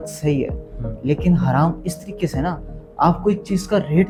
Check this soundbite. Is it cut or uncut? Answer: uncut